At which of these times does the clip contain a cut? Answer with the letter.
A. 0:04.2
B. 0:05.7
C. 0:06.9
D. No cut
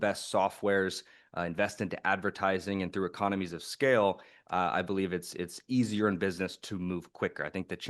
D